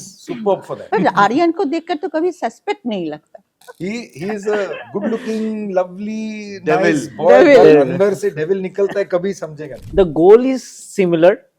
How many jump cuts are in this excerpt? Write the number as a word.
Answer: three